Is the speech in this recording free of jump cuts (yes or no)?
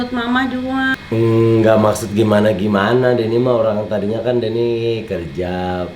no